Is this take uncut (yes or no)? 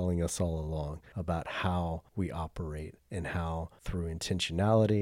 no